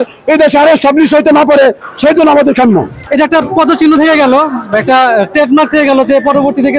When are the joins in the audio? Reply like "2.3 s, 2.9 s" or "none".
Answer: 3.1 s